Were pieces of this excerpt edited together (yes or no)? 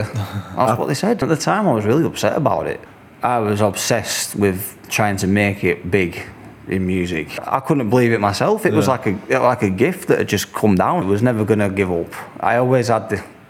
yes